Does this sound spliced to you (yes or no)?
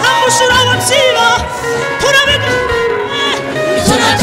no